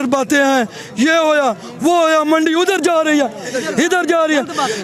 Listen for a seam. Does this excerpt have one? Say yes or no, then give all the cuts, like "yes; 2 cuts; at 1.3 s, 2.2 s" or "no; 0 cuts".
no; 0 cuts